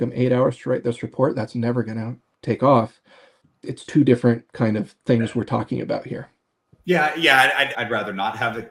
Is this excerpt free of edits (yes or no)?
yes